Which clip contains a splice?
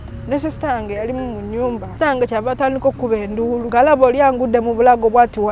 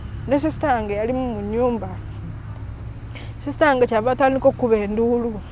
first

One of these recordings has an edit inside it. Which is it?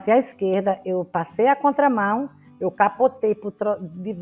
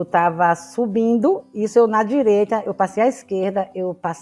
second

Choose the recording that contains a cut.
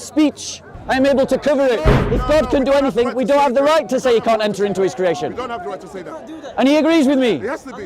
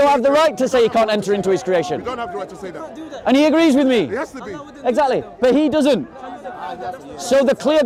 first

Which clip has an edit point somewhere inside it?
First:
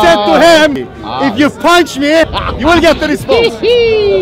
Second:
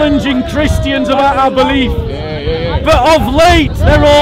first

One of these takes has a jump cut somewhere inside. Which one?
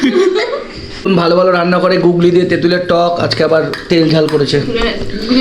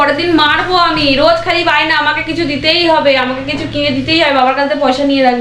first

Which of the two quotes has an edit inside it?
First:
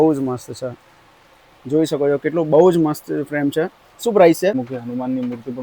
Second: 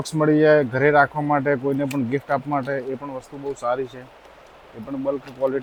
first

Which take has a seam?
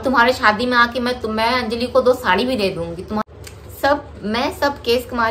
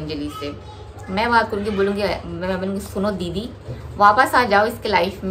first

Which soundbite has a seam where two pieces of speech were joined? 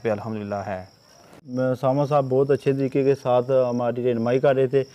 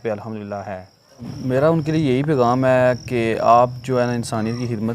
second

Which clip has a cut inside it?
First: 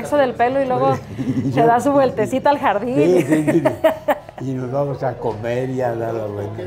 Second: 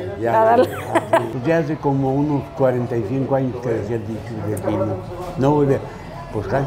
second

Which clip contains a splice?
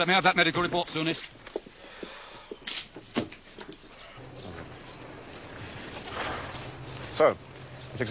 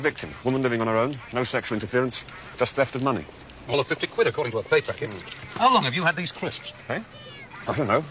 second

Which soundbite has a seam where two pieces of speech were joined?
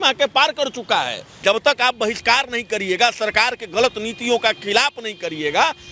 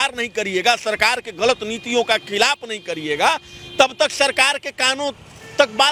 first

